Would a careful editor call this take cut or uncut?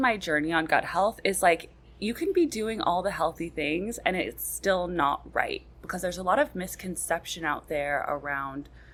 uncut